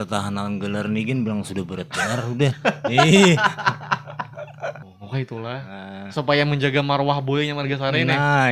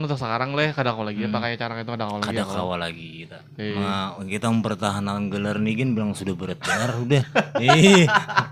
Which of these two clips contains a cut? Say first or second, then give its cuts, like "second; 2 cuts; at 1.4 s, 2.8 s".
first; 1 cut; at 4.8 s